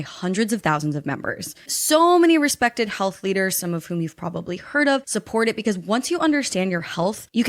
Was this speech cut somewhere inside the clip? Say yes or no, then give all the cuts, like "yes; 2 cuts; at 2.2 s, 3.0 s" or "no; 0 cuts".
no; 0 cuts